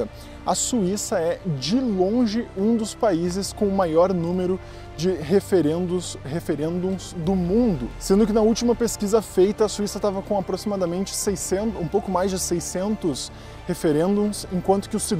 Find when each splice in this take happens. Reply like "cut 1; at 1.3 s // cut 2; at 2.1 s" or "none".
none